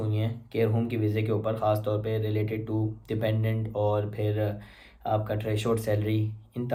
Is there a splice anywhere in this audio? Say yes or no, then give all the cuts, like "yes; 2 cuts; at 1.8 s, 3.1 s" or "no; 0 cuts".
no; 0 cuts